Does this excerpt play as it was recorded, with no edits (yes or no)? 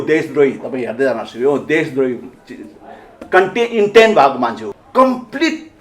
no